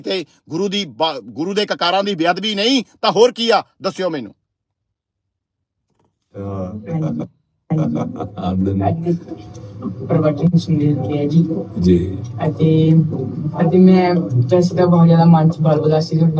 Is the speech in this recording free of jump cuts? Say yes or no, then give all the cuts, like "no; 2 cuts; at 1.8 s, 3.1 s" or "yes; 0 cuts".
yes; 0 cuts